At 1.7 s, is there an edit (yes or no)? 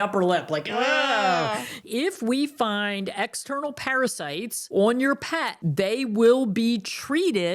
yes